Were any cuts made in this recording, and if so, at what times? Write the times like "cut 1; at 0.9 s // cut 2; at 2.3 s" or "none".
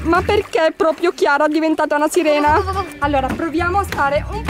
cut 1; at 2.9 s

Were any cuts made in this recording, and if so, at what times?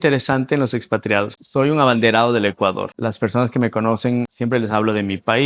cut 1; at 1.3 s // cut 2; at 2.9 s // cut 3; at 4.3 s

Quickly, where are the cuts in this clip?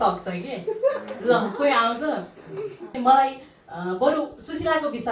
cut 1; at 2.9 s

